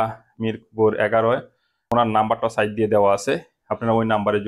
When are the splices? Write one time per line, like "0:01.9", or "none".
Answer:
0:01.8